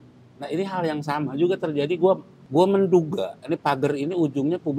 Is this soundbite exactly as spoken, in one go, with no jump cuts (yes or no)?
no